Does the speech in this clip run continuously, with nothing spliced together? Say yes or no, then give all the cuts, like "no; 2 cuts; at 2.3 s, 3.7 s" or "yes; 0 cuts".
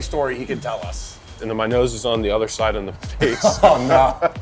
no; 1 cut; at 1.4 s